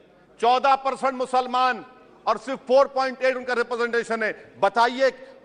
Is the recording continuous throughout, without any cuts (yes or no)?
yes